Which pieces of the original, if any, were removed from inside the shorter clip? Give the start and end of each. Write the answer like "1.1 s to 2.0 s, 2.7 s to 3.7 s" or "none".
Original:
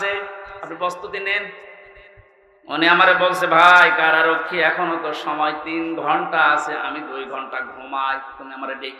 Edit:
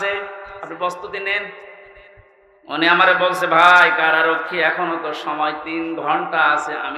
none